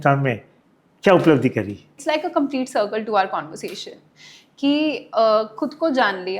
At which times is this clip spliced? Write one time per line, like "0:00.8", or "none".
0:01.9